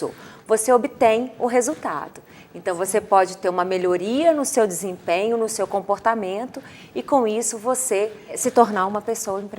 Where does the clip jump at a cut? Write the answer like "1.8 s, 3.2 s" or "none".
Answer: 8.4 s